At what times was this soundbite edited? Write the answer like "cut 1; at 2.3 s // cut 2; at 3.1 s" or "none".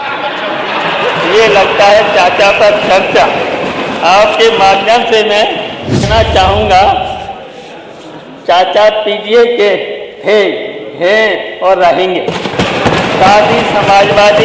cut 1; at 6.1 s